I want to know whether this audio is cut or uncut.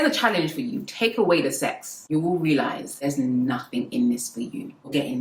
uncut